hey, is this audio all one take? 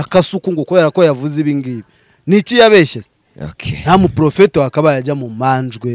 no; 1 cut; at 3.0 s

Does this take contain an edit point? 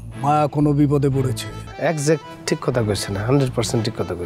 yes; 1 cut; at 1.6 s

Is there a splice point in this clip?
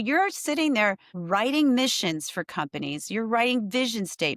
yes; 1 cut; at 1.1 s

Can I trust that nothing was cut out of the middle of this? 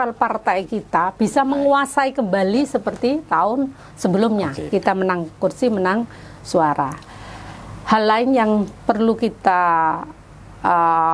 yes; 0 cuts

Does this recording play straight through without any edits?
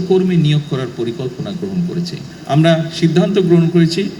no; 1 cut; at 2.3 s

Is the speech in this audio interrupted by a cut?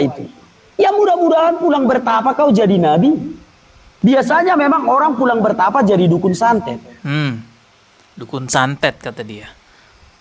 no; 0 cuts

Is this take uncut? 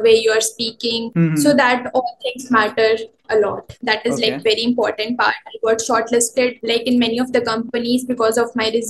no; 3 cuts; at 1.0 s, 3.7 s, 6.6 s

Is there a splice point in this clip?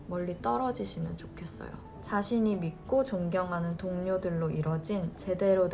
yes; 1 cut; at 1.9 s

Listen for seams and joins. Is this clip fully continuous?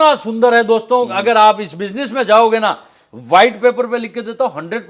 yes; 0 cuts

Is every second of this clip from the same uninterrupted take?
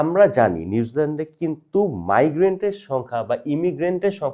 yes; 0 cuts

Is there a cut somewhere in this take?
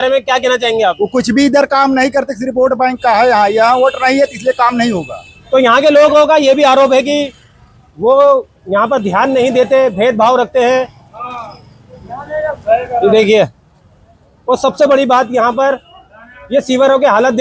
no; 0 cuts

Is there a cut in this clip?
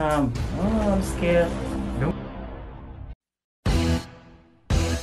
no; 0 cuts

